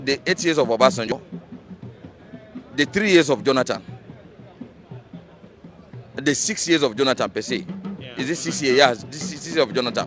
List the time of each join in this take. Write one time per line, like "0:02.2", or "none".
0:01.1